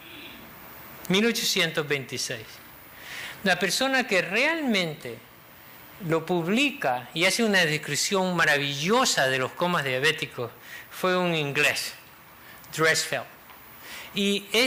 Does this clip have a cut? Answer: no; 0 cuts

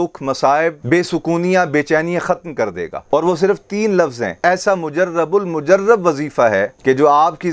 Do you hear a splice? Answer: yes; 1 cut; at 4.3 s

